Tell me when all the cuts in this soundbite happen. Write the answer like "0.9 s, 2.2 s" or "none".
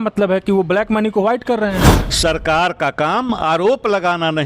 2.0 s